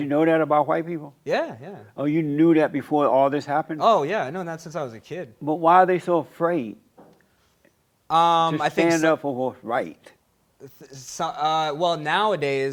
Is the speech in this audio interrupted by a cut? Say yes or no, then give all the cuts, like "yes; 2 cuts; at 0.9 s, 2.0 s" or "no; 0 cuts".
no; 0 cuts